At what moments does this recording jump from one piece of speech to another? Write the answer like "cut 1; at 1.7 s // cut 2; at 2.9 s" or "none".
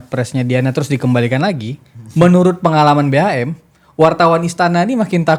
none